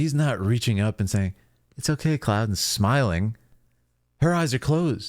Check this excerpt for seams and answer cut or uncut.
uncut